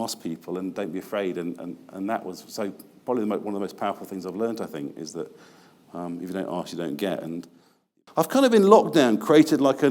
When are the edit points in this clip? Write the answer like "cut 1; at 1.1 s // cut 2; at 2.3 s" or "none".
cut 1; at 7.8 s